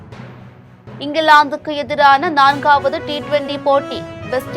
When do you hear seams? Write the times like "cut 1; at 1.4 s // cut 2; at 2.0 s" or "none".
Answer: cut 1; at 1.0 s

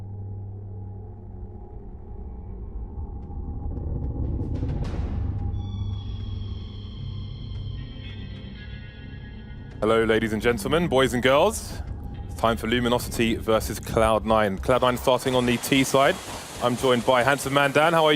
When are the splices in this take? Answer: cut 1; at 4.5 s

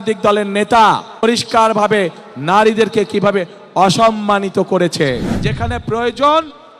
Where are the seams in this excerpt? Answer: cut 1; at 1.2 s // cut 2; at 5.4 s

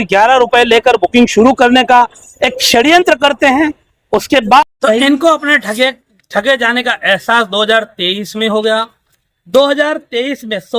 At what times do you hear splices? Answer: cut 1; at 4.7 s

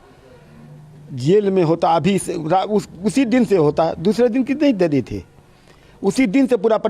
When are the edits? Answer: none

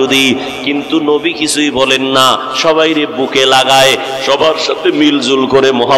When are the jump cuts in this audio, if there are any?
none

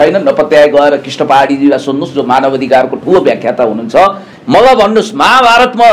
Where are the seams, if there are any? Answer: cut 1; at 4.3 s

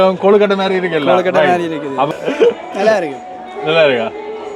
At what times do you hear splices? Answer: cut 1; at 2.1 s

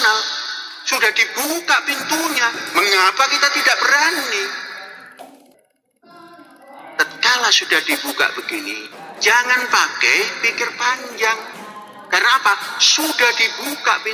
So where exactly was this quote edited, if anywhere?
cut 1; at 5.6 s

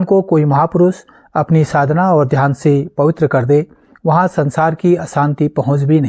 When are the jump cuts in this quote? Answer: none

